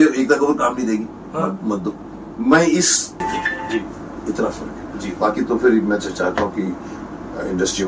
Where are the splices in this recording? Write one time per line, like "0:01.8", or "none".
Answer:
0:03.2